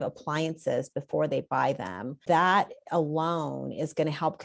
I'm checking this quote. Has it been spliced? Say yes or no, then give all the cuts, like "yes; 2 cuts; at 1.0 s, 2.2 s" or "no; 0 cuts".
yes; 1 cut; at 2.2 s